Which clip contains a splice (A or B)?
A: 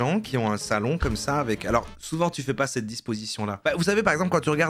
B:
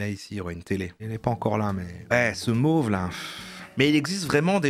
B